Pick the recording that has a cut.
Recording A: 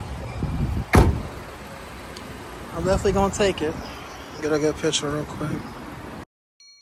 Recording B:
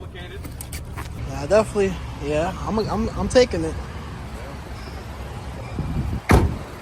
B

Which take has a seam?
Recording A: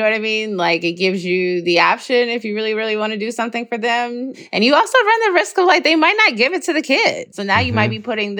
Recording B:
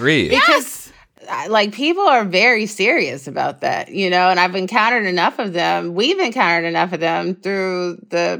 A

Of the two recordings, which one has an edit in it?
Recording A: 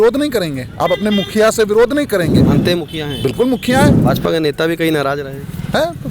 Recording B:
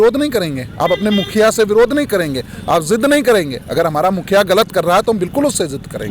A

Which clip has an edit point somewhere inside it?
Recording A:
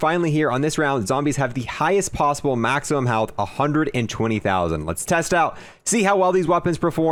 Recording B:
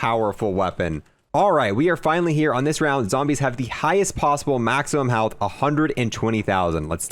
B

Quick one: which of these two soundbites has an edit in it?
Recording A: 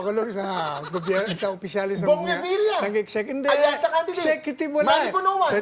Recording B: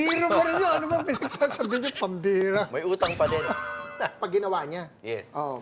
B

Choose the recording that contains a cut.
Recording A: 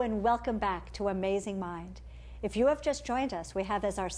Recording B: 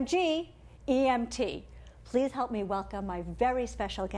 B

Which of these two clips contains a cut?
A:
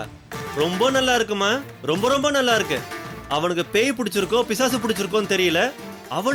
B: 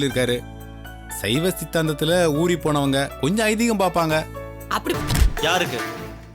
B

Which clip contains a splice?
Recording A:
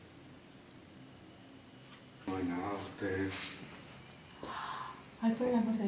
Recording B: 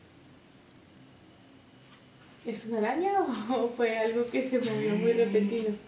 A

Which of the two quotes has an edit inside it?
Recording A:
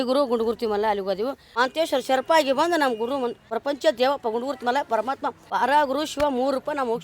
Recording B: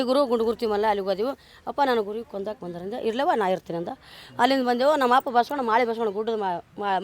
A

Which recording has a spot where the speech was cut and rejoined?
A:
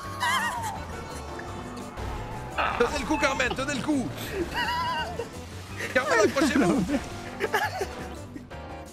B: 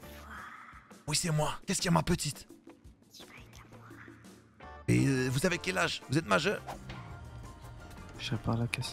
B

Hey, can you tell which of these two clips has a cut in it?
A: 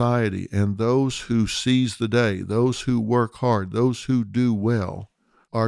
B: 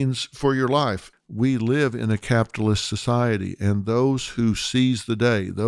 B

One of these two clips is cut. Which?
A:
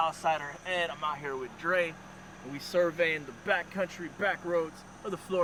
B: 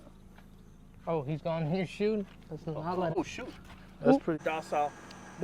B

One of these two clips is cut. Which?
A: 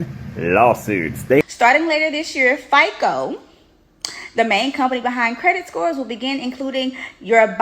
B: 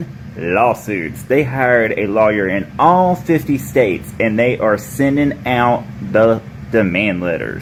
A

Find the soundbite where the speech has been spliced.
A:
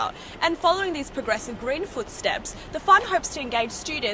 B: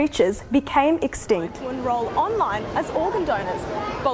B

